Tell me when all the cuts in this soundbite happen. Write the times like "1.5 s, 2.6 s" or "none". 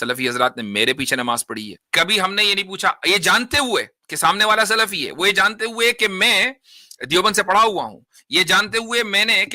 1.8 s